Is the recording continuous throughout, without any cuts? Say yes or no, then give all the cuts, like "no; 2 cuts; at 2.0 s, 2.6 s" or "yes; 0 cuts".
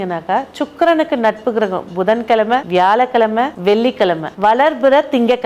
no; 2 cuts; at 2.7 s, 3.8 s